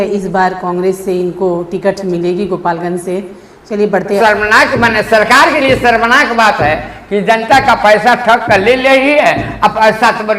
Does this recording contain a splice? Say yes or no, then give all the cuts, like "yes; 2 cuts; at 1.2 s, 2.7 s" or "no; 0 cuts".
yes; 1 cut; at 4.2 s